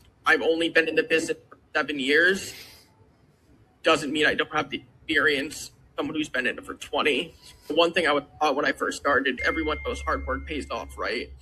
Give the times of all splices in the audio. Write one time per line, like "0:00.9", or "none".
0:09.4